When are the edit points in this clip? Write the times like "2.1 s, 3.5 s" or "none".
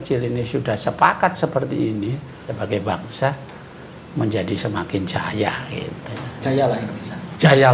2.5 s